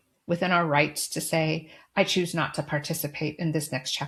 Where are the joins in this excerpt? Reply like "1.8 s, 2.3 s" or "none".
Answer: none